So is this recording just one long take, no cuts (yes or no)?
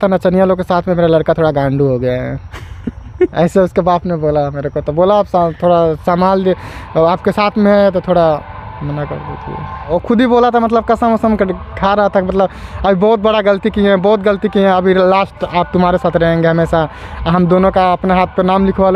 yes